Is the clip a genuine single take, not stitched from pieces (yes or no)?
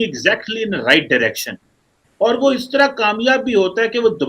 yes